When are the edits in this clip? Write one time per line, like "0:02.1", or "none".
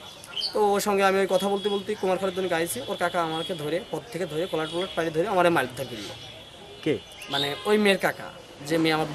none